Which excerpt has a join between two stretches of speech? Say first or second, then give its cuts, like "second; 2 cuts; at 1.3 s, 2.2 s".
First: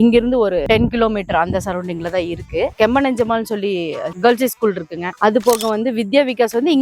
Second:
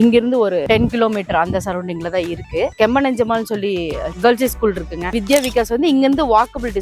second; 1 cut; at 5.1 s